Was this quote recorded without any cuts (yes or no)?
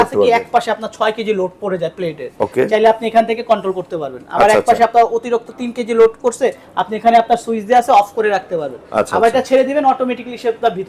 yes